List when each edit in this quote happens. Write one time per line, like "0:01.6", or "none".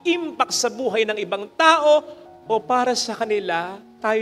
none